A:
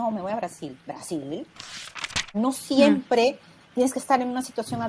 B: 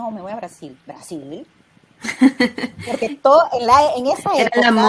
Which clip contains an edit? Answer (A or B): A